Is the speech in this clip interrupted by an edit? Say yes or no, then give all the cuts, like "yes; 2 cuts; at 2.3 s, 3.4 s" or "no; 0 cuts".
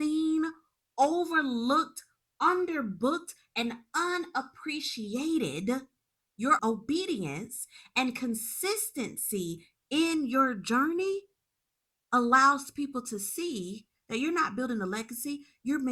yes; 1 cut; at 6.6 s